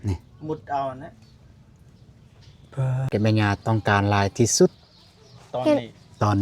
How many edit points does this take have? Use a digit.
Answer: 1